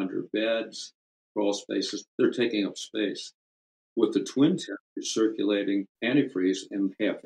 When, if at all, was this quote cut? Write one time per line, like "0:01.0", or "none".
0:05.9